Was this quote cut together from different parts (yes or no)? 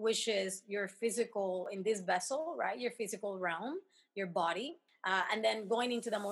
yes